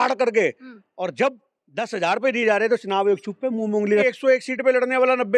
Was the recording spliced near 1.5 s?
no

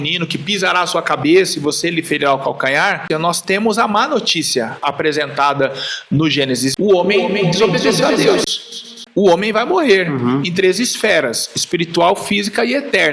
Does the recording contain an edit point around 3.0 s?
yes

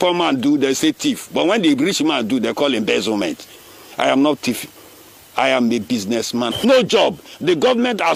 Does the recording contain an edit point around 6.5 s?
yes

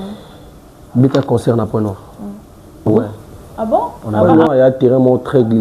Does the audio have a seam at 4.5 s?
no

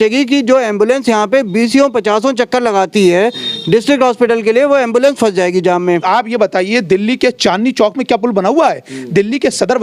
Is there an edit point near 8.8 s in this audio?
no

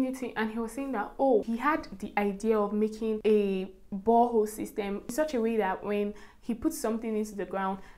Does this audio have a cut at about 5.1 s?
yes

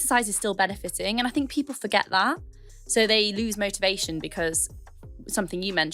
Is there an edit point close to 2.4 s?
no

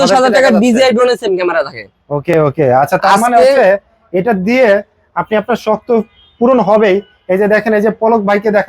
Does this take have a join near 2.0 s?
no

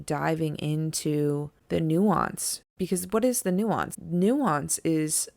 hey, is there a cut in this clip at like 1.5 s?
yes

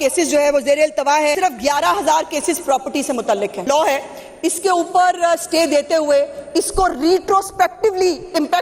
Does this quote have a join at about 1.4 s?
yes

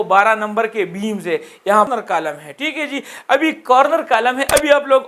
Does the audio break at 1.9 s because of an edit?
yes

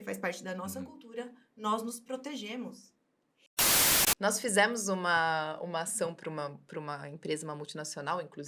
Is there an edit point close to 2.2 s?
no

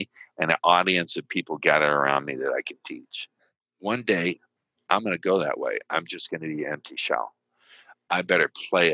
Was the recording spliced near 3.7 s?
yes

